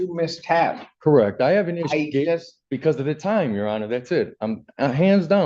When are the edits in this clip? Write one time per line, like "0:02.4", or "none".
none